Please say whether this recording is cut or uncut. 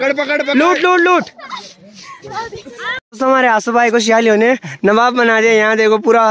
uncut